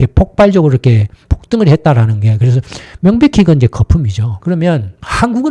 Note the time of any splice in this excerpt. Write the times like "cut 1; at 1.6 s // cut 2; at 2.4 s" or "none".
cut 1; at 4.3 s

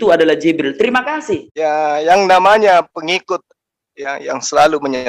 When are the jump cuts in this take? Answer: cut 1; at 1.5 s

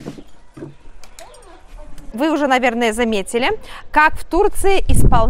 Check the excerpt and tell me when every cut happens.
cut 1; at 2.0 s

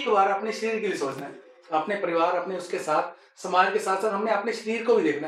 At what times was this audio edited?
none

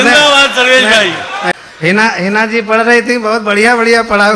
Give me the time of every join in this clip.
cut 1; at 1.5 s

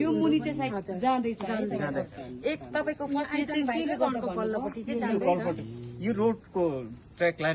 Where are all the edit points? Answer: none

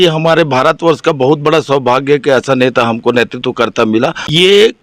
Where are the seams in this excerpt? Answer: cut 1; at 3.7 s

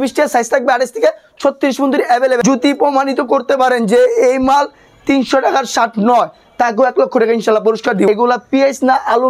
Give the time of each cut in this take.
cut 1; at 2.4 s // cut 2; at 8.1 s

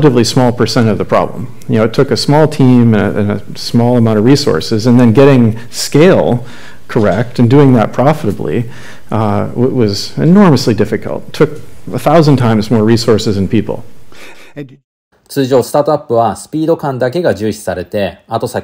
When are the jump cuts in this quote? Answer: none

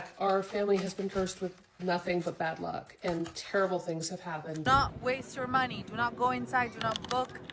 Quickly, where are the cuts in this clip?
cut 1; at 4.7 s

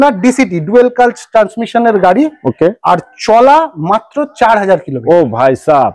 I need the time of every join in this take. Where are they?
none

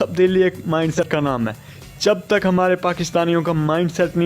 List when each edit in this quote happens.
cut 1; at 1.0 s

